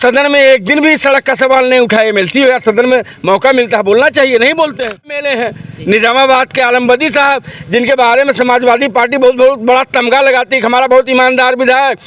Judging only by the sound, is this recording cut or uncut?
cut